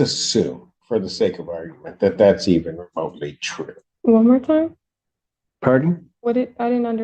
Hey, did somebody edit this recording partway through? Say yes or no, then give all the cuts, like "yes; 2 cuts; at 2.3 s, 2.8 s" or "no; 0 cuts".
yes; 1 cut; at 3.9 s